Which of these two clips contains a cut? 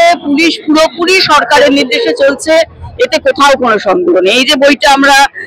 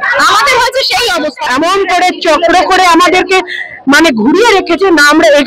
second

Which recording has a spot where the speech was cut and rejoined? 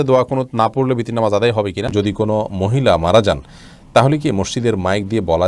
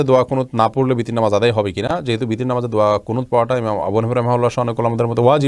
first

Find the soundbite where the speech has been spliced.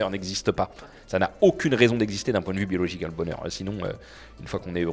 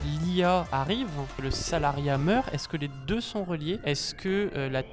second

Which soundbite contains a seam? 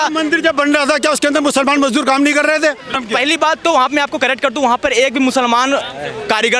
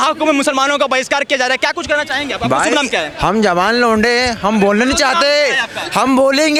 first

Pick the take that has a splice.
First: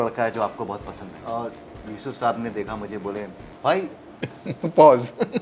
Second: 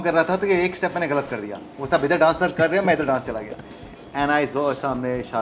first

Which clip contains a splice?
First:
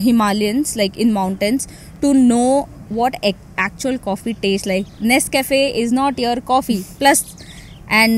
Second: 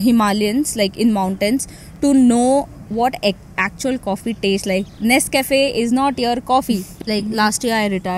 second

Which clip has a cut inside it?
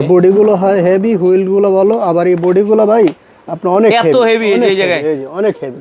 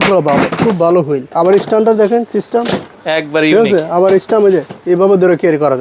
second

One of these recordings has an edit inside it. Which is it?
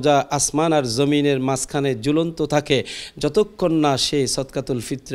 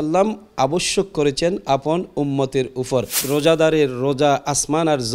second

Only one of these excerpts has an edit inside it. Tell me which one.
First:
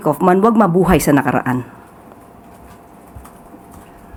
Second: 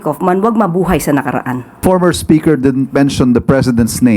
second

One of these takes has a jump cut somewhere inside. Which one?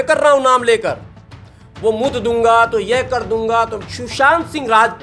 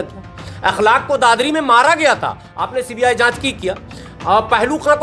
first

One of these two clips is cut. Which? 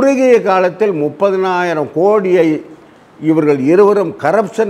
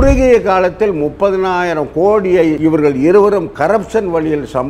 second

